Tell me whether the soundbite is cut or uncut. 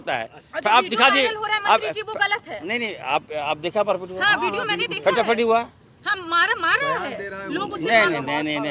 uncut